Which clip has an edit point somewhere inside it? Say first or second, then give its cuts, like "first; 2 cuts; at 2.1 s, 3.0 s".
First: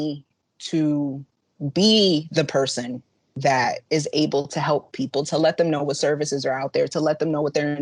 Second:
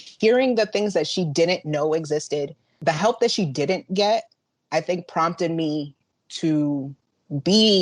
second; 1 cut; at 2.7 s